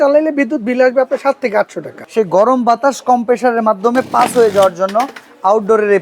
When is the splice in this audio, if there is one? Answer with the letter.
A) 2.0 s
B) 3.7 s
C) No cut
A